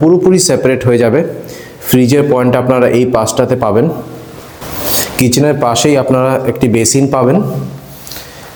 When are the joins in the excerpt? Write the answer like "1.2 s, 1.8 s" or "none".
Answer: none